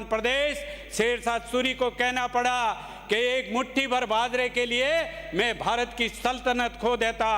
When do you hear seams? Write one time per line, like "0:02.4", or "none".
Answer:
none